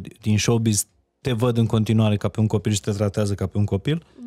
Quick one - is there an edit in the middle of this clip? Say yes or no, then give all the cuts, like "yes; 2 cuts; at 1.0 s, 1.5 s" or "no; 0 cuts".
no; 0 cuts